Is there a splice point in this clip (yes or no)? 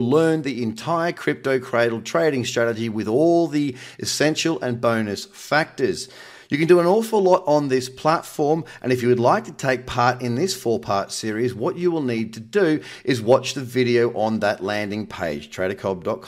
no